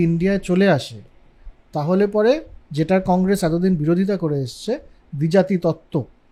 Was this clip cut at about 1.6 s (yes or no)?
no